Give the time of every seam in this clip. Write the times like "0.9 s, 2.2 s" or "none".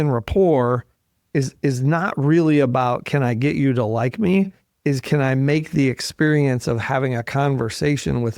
none